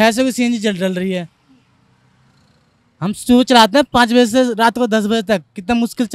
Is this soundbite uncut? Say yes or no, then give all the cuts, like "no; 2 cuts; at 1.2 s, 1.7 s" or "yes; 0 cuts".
yes; 0 cuts